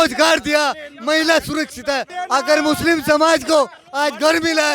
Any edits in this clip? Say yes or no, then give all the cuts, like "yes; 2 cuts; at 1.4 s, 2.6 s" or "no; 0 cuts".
yes; 1 cut; at 2.1 s